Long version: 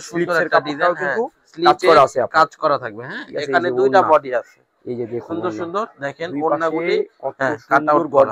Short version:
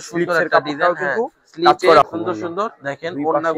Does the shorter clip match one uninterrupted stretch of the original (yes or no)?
no